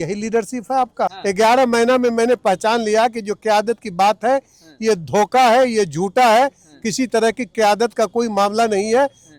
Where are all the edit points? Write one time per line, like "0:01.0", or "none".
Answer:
0:01.2